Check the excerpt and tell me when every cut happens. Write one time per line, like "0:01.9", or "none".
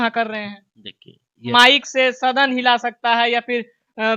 0:01.5

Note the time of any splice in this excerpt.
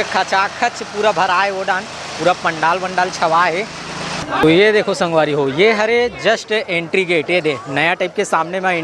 0:04.2

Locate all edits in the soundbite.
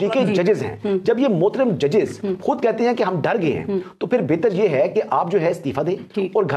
none

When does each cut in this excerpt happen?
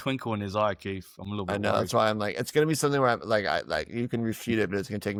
none

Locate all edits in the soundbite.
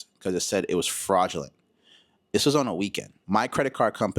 0:03.1

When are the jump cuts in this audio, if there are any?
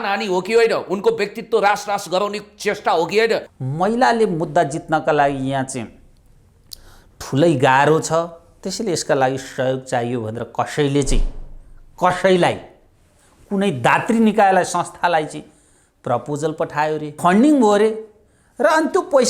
0:03.5
0:17.1

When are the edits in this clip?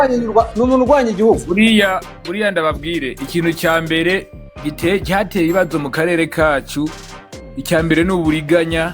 0:01.4

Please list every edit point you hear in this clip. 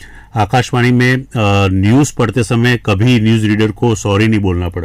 none

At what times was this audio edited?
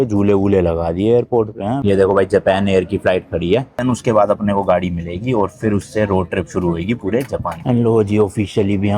0:01.8
0:03.8
0:07.6

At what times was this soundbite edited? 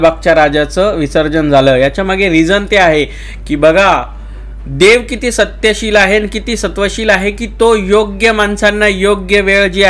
none

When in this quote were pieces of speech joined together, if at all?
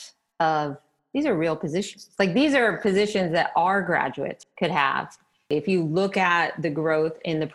0:04.4
0:05.5

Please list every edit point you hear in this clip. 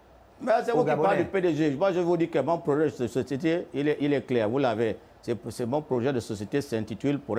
none

